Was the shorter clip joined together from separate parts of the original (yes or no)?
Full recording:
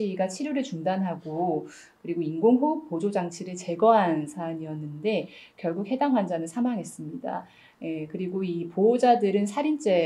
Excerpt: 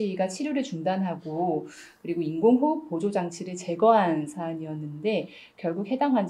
no